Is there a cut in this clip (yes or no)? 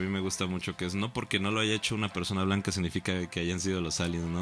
no